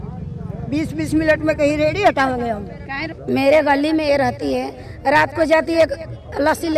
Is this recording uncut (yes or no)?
no